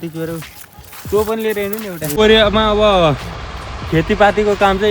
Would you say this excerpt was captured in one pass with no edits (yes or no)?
no